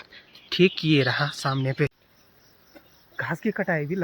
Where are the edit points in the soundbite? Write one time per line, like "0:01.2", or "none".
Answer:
0:02.7